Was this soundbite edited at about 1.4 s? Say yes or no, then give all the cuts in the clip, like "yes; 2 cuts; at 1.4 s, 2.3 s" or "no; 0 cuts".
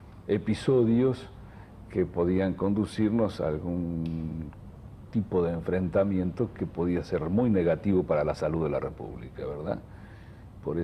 no; 1 cut; at 4.0 s